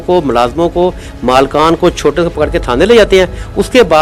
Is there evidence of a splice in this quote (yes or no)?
no